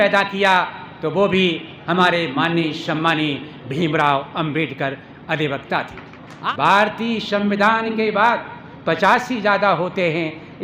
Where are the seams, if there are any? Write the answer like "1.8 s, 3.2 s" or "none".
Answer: 6.3 s